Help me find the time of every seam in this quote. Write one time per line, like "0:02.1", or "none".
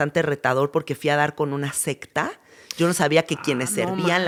none